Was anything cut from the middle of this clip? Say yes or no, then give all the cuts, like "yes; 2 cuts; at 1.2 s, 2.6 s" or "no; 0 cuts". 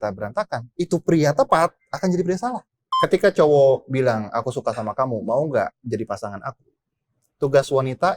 yes; 1 cut; at 2.8 s